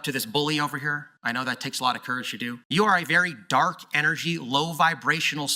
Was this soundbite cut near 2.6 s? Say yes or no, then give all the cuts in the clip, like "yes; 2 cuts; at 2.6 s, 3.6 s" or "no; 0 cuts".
yes; 1 cut; at 2.6 s